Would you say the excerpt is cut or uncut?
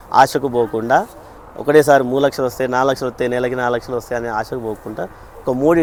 uncut